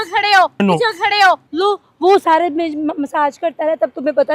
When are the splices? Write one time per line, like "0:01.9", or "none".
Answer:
0:01.5